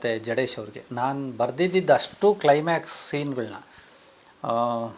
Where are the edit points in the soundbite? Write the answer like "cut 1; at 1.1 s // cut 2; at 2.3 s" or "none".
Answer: none